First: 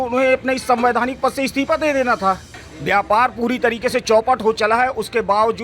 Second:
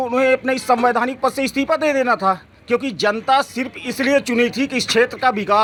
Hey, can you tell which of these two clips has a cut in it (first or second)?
first